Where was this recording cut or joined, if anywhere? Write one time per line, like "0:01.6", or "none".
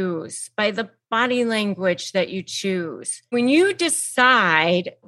0:03.2